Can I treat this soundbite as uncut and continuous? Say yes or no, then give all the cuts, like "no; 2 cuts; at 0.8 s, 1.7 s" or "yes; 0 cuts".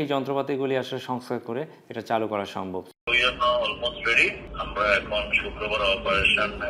no; 1 cut; at 2.9 s